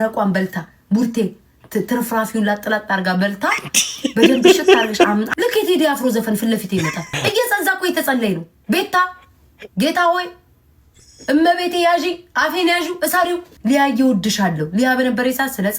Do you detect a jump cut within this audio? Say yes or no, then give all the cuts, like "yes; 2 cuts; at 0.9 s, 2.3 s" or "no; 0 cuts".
yes; 2 cuts; at 5.3 s, 13.5 s